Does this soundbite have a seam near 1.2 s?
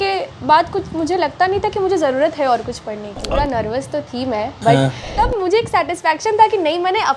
no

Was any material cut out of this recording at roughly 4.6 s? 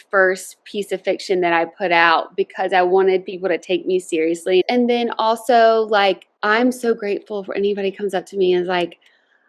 yes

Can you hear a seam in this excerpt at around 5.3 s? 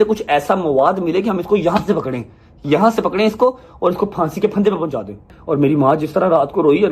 yes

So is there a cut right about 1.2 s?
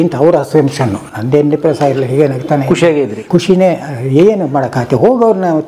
no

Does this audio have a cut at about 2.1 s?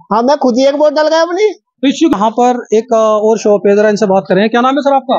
yes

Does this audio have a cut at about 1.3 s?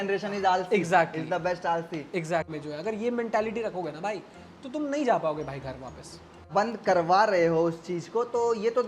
no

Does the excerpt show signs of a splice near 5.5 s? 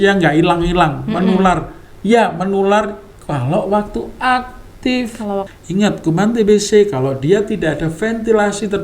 yes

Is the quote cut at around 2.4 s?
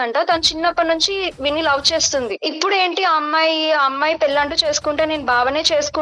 yes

